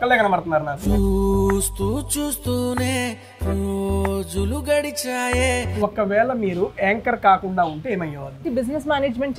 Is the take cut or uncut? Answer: uncut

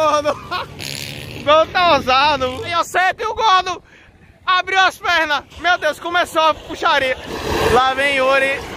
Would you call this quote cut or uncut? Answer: cut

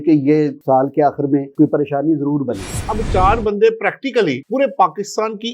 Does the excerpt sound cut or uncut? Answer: cut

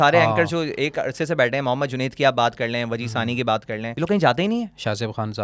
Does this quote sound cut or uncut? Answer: cut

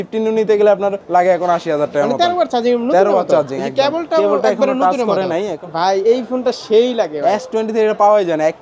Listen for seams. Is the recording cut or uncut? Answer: cut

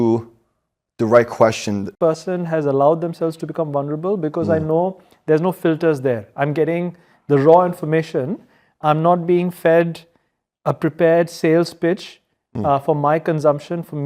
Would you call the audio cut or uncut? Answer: cut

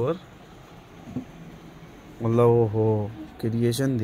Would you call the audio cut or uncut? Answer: uncut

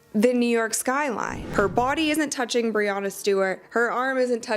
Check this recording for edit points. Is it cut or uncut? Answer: cut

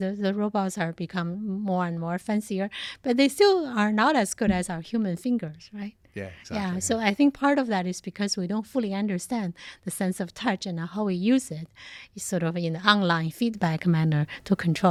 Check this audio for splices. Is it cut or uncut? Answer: uncut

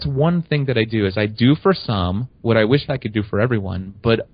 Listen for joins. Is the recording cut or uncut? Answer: uncut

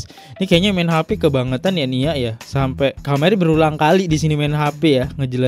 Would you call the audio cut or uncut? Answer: uncut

